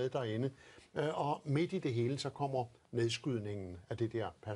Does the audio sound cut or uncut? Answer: cut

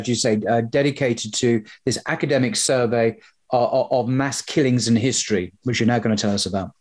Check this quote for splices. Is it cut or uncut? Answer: uncut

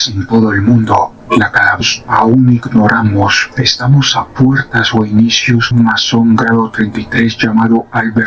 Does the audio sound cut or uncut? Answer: cut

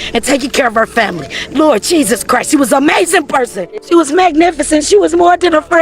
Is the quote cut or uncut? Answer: cut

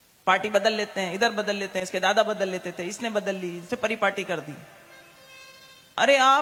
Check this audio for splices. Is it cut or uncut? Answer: uncut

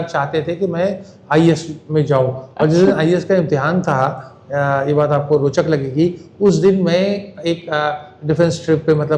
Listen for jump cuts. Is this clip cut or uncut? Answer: uncut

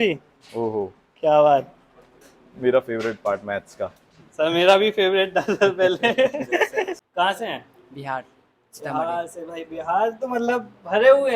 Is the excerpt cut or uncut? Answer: cut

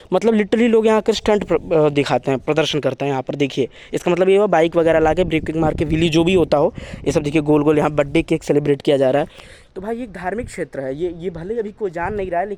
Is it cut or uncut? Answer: uncut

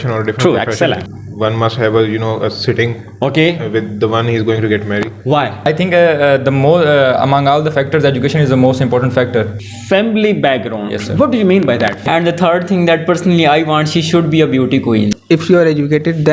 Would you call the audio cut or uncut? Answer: cut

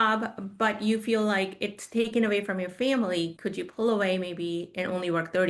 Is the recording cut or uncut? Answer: uncut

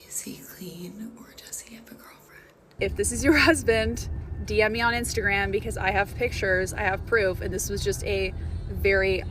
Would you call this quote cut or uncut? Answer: cut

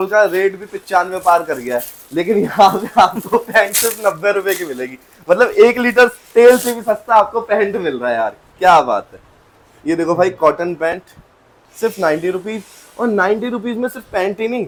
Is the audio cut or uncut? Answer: uncut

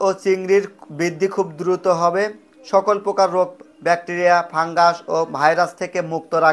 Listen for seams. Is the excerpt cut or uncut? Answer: uncut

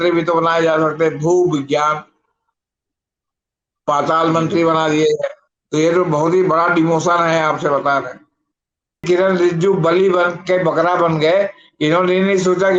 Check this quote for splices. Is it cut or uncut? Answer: cut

